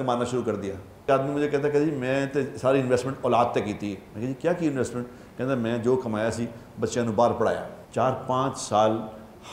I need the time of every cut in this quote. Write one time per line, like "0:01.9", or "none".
0:01.1
0:07.8